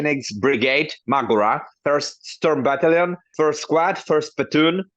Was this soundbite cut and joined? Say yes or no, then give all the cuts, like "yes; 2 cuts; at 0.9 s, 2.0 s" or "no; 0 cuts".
yes; 2 cuts; at 1.7 s, 3.2 s